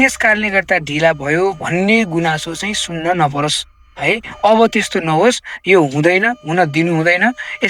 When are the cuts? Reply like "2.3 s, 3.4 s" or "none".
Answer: none